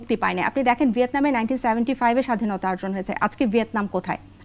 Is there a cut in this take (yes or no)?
no